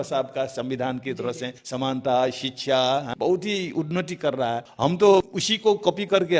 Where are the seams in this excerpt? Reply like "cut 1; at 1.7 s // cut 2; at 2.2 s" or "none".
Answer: cut 1; at 1.6 s // cut 2; at 3.1 s // cut 3; at 4.7 s // cut 4; at 5.4 s